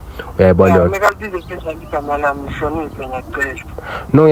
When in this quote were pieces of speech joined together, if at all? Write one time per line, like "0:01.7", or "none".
none